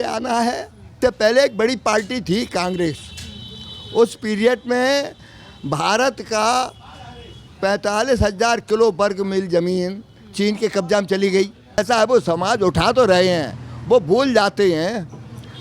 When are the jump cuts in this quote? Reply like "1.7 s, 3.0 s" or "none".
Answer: 1.0 s, 11.8 s